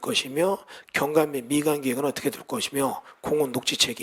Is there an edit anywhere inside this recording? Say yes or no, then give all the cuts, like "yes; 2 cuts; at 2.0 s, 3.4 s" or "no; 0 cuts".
no; 0 cuts